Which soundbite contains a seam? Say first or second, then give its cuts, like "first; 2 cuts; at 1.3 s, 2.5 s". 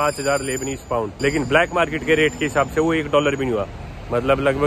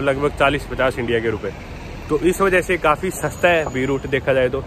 first; 1 cut; at 1.1 s